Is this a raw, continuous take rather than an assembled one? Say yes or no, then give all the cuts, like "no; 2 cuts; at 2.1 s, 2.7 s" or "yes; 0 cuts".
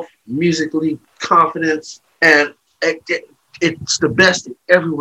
no; 2 cuts; at 1.1 s, 2.0 s